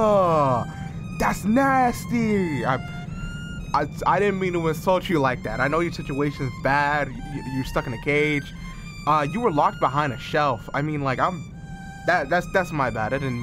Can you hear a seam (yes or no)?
no